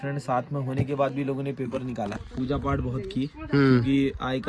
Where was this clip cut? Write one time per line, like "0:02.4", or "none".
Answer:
0:02.1